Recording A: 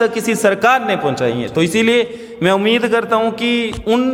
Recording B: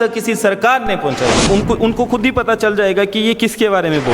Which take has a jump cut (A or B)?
B